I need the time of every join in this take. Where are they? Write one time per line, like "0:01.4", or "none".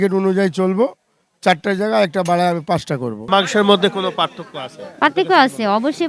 0:03.3